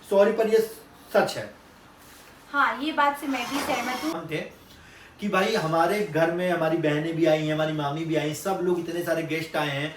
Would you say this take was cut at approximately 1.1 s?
no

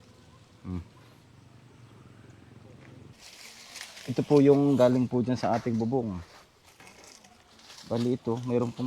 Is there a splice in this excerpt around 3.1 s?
yes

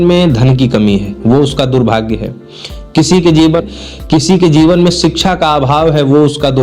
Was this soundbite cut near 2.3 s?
no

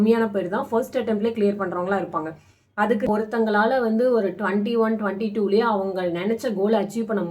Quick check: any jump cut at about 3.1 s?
yes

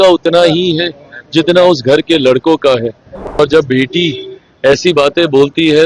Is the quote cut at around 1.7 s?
no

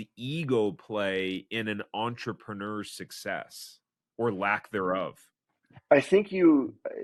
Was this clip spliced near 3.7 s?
no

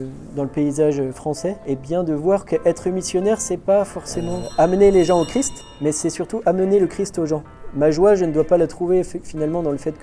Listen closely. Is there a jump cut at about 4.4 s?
yes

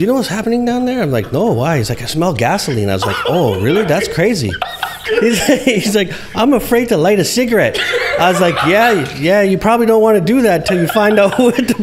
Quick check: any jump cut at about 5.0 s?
yes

